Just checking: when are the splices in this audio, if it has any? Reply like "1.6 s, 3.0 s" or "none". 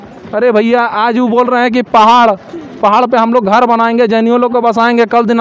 none